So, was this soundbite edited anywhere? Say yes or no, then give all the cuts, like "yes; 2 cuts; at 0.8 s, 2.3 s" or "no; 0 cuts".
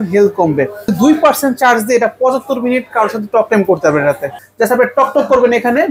yes; 2 cuts; at 0.9 s, 4.4 s